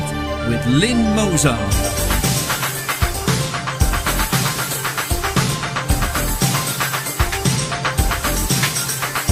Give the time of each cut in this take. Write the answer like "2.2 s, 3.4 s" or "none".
none